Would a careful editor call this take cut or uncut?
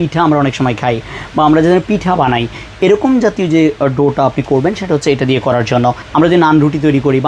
cut